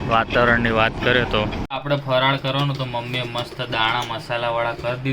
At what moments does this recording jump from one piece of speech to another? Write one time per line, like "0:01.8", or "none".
0:01.6